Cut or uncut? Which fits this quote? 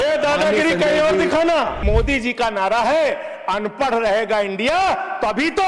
cut